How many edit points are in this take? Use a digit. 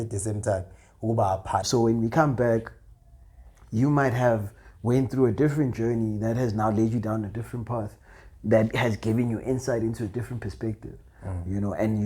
1